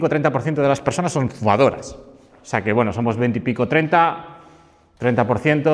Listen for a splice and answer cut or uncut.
uncut